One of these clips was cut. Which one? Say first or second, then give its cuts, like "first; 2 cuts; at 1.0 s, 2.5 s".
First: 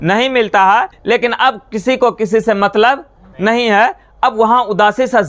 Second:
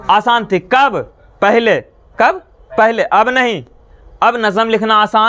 first; 1 cut; at 0.9 s